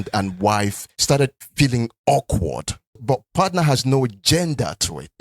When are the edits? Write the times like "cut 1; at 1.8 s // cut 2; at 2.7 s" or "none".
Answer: cut 1; at 3.3 s